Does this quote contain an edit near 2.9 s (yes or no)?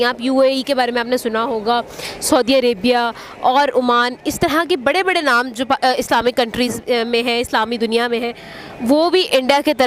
no